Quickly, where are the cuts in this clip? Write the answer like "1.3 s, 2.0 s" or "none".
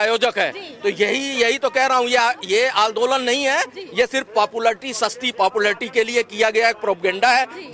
none